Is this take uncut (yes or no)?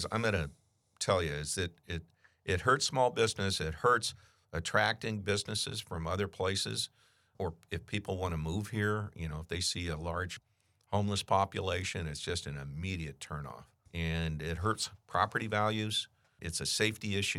no